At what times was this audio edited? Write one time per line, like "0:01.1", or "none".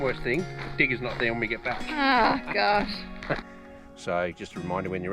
0:03.4